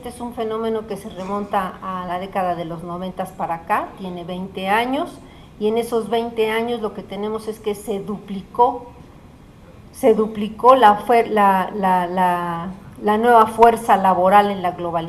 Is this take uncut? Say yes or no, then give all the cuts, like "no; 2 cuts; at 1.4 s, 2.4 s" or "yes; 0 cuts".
yes; 0 cuts